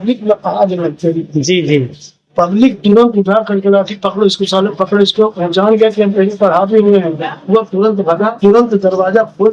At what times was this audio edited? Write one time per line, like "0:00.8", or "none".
0:08.4